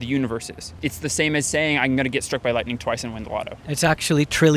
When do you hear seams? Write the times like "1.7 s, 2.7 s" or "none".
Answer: 0.8 s, 3.6 s

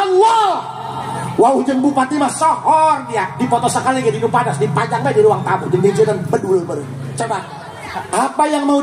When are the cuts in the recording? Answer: 7.0 s

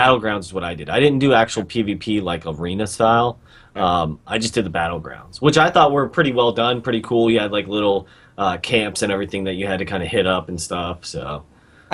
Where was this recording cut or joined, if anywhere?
none

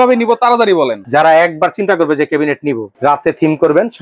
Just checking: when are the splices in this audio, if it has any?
1.0 s, 2.9 s

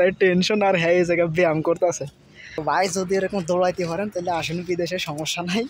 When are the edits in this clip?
2.6 s

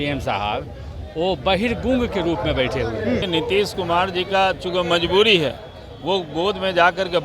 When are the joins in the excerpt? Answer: 3.2 s

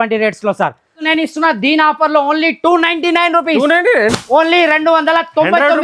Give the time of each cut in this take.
1.0 s

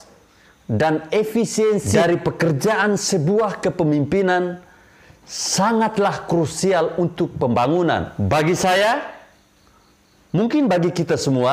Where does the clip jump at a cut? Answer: 1.9 s, 8.1 s

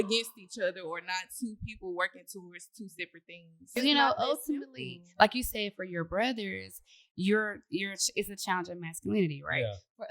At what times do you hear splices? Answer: 3.7 s

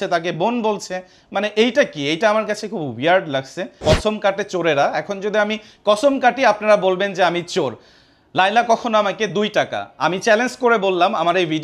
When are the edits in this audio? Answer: 3.8 s

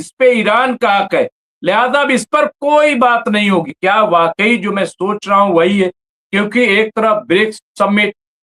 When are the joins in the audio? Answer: 3.7 s

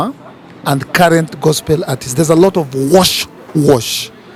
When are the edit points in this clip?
none

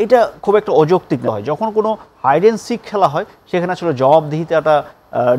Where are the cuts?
1.3 s

